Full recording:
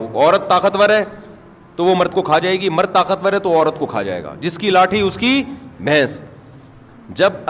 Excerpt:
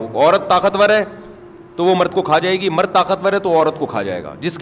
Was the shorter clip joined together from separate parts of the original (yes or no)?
no